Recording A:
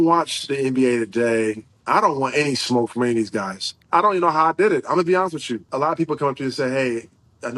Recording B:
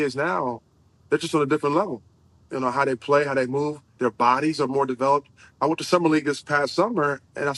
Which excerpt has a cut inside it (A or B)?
A